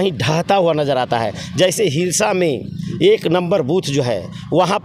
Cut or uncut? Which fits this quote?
uncut